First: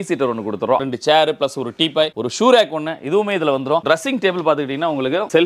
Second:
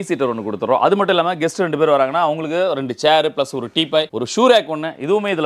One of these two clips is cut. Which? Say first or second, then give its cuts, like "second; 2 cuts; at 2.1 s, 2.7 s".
first; 2 cuts; at 0.8 s, 3.8 s